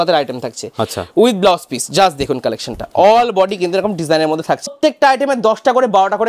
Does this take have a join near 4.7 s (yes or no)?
yes